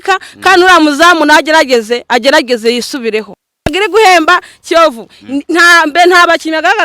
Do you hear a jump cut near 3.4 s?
yes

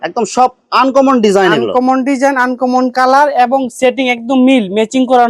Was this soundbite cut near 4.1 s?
no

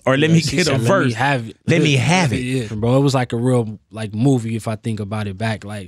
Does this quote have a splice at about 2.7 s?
yes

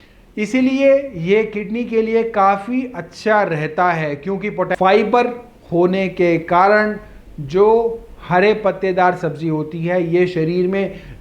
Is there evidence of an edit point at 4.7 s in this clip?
yes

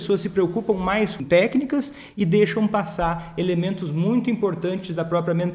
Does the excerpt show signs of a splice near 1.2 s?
yes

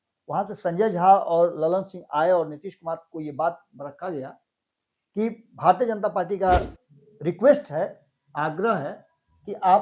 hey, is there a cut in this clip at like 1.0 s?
no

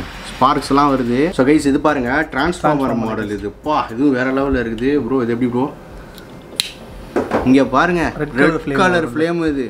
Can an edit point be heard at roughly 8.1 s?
no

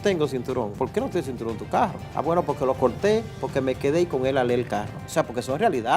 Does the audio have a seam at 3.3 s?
no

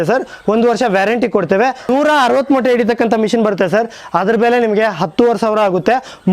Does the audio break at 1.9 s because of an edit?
yes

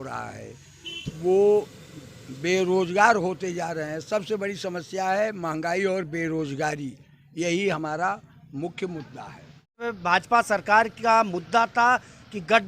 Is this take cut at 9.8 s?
yes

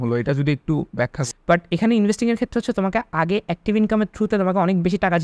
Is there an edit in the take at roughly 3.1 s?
no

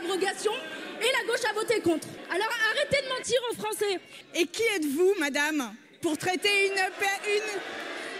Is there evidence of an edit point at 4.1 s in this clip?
yes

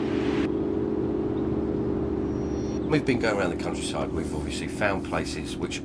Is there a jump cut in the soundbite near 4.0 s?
no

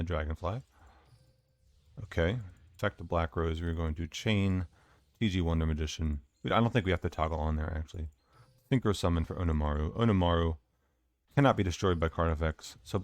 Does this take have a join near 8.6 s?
no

